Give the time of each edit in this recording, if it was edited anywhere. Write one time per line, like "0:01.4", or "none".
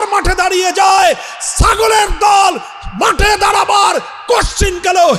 none